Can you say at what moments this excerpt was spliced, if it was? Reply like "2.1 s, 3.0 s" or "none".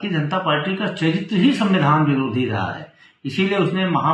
none